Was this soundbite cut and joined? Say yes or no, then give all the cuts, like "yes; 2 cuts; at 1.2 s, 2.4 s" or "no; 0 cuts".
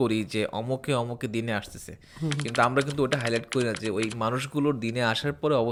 no; 0 cuts